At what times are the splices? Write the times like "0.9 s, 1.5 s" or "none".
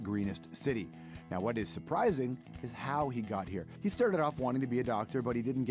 3.7 s